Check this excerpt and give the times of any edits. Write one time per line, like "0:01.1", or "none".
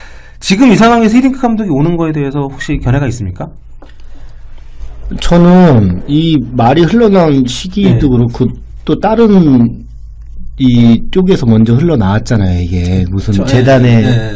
none